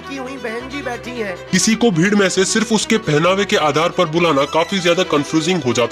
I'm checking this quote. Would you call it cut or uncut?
uncut